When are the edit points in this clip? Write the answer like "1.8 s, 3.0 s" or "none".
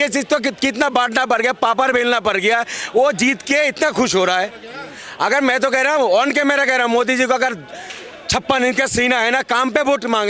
none